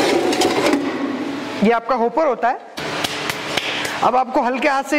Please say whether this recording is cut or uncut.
cut